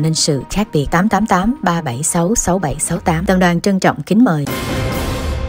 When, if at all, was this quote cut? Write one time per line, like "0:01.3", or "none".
0:04.4